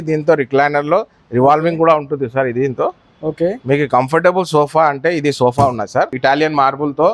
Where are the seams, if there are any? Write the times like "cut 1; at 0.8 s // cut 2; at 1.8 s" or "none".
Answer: cut 1; at 6.1 s